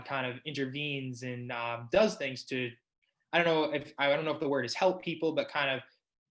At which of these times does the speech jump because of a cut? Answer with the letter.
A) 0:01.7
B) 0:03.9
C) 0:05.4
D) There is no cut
D